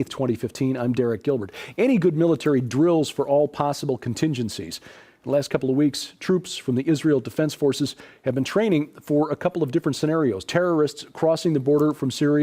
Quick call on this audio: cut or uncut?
cut